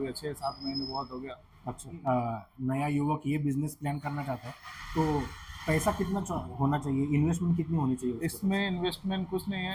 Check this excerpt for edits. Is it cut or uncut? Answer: uncut